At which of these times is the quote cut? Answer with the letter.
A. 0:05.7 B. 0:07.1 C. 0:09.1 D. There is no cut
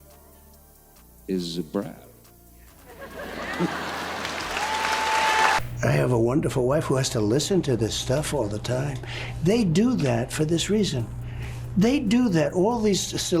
A